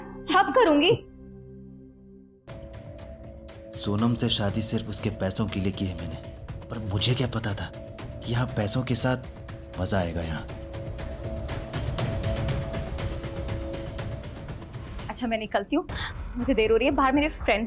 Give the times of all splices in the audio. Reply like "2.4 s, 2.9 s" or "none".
none